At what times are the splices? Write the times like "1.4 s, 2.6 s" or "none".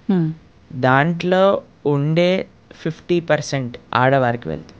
3.8 s